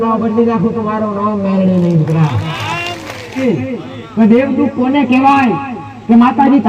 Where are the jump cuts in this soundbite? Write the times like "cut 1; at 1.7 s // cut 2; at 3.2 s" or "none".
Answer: cut 1; at 3.4 s